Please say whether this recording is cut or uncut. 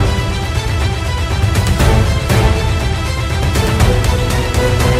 uncut